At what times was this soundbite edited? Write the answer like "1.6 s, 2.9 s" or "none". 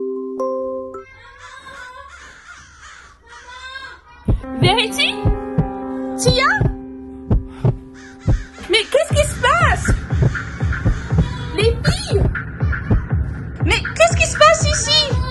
0.9 s